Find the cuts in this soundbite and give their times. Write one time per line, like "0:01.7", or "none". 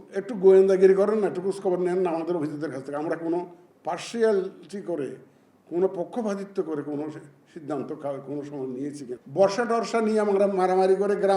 0:09.1